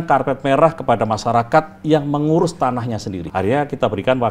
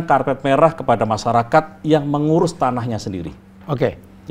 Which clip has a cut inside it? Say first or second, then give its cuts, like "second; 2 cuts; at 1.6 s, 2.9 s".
first; 1 cut; at 3.2 s